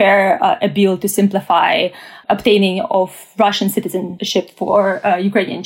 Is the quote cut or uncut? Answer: cut